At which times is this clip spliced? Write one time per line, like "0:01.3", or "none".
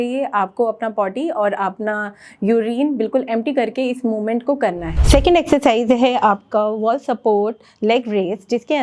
0:04.9